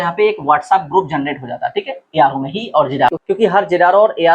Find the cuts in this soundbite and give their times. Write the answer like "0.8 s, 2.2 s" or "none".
3.1 s